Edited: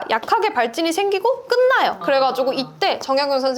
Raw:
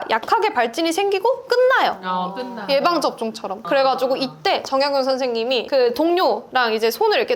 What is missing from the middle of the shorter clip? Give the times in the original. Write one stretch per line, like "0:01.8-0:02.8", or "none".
0:02.0-0:03.6